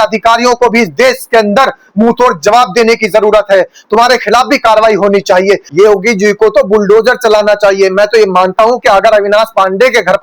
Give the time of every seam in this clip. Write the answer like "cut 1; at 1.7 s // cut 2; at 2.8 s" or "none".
cut 1; at 5.7 s

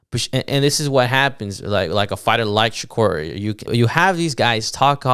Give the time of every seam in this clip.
cut 1; at 3.7 s

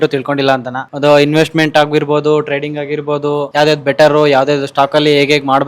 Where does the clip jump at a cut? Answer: none

